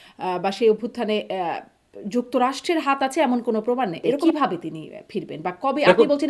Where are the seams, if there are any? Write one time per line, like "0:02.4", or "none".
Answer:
0:04.2